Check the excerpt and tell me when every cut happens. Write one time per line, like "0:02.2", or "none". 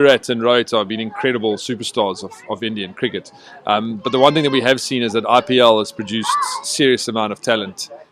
none